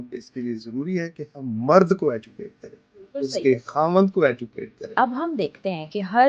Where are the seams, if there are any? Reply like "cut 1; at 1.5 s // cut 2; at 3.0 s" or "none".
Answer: cut 1; at 4.9 s